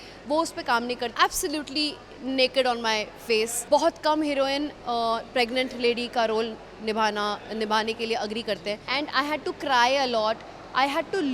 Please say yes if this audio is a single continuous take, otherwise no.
no